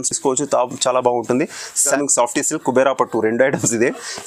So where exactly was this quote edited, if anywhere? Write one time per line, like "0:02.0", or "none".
0:02.0